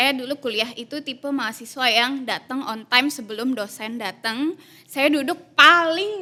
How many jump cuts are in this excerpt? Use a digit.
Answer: 0